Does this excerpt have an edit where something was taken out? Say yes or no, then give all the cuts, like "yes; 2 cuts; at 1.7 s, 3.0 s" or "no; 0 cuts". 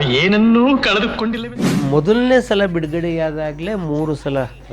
yes; 1 cut; at 1.7 s